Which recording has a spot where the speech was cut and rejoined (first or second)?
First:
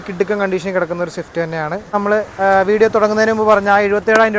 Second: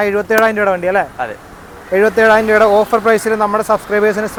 first